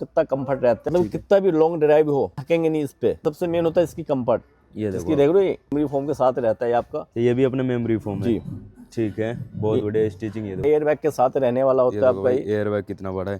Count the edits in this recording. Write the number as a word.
five